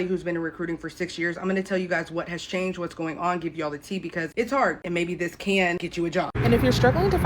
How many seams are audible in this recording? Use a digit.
1